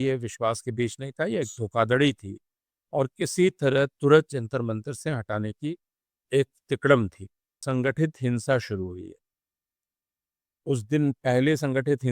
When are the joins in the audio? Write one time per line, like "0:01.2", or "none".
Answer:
0:07.6

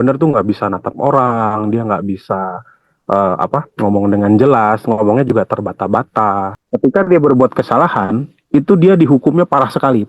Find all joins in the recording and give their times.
0:06.6

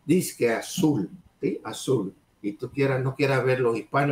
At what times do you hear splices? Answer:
0:01.2
0:02.2

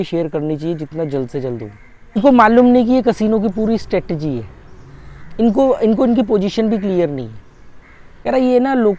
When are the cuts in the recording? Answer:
0:02.2
0:08.1

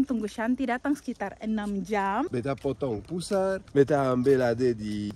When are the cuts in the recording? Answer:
0:02.3

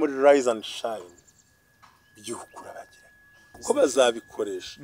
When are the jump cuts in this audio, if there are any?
0:03.5

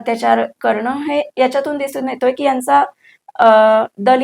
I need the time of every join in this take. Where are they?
none

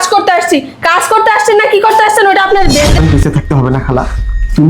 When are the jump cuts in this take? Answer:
0:02.9

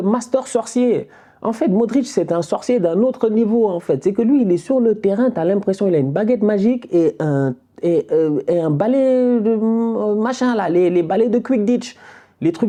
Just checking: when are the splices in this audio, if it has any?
none

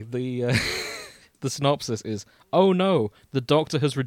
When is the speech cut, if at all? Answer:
0:01.3

